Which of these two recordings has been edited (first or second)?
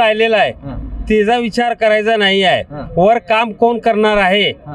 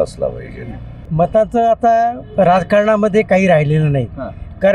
second